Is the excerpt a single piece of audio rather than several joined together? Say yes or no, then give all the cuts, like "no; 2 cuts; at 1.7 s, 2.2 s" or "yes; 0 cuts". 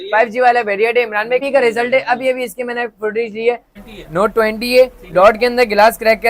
no; 2 cuts; at 1.4 s, 3.8 s